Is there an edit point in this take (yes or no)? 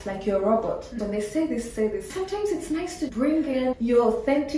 no